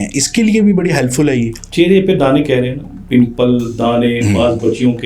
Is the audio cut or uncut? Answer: cut